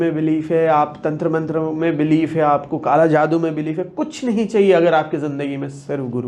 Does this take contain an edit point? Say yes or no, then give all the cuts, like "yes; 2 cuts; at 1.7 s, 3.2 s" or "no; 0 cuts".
no; 0 cuts